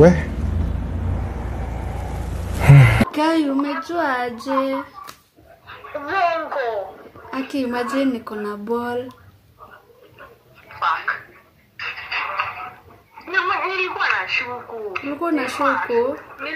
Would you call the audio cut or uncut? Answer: cut